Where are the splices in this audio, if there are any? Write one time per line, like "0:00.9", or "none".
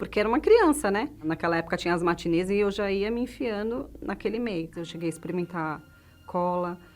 0:04.8